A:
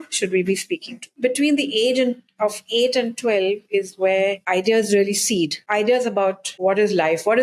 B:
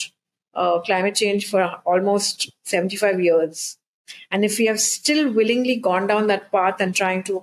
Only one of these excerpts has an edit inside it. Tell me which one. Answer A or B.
A